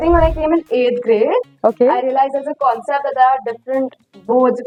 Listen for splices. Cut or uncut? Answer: uncut